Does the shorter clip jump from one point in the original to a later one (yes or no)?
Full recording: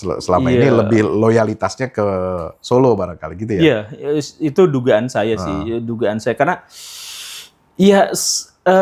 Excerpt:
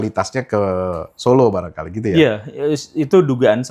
no